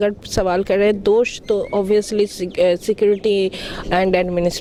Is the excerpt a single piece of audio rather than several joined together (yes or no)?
yes